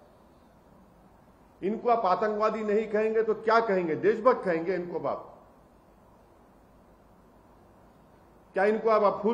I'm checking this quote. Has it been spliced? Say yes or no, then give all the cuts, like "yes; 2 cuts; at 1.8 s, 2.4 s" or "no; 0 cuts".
no; 0 cuts